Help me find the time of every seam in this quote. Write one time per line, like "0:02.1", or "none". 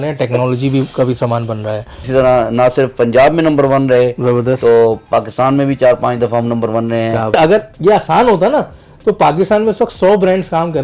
0:02.1
0:07.3